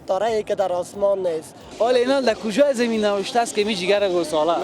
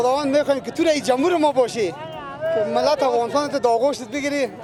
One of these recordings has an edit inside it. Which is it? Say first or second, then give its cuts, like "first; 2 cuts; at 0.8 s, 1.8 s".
first; 1 cut; at 1.6 s